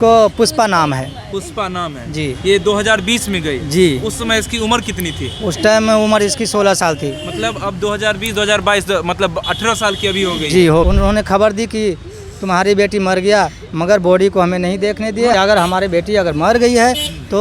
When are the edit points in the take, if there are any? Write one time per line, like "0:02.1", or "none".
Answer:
0:10.9
0:15.3